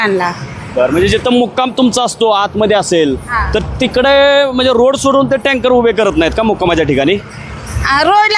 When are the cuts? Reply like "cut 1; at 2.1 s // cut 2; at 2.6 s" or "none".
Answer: none